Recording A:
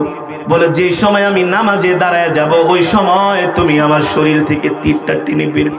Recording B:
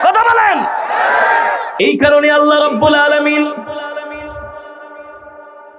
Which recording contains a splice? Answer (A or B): B